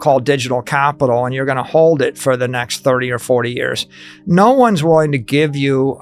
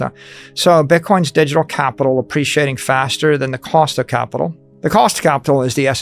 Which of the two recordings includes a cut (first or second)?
second